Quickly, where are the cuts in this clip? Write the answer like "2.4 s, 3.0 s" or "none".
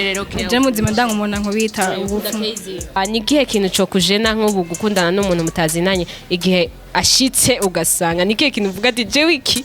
3.0 s